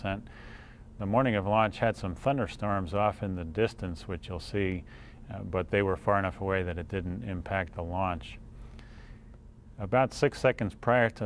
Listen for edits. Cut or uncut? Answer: cut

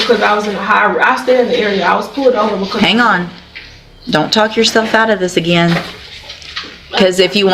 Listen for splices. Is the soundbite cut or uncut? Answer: uncut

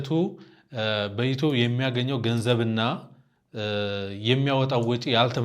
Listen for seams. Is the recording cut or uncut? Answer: uncut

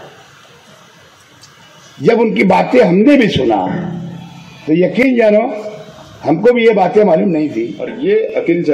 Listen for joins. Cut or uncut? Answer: cut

